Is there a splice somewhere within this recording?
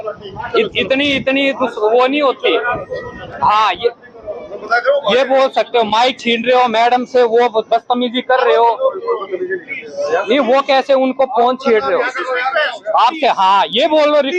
no; 0 cuts

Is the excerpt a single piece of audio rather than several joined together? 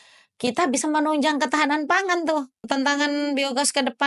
no; 1 cut; at 2.6 s

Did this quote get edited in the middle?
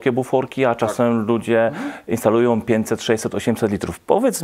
no; 0 cuts

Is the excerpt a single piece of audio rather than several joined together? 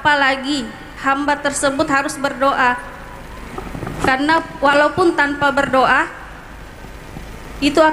yes; 0 cuts

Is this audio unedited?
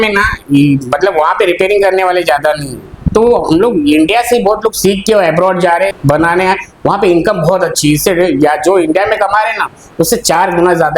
no; 1 cut; at 6.0 s

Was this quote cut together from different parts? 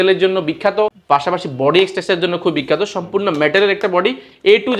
yes; 1 cut; at 1.0 s

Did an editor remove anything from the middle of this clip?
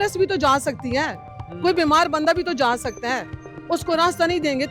no; 0 cuts

